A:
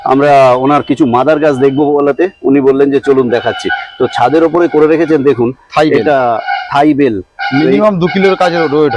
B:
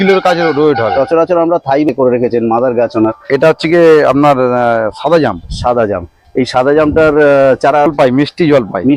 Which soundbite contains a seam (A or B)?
B